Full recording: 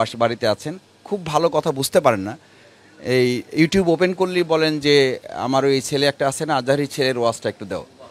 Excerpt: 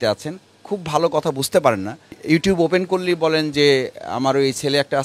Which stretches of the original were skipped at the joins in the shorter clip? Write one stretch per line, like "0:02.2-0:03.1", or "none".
0:02.6-0:03.4